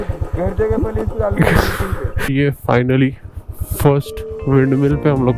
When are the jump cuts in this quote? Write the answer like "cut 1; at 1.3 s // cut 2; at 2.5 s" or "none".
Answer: cut 1; at 2.1 s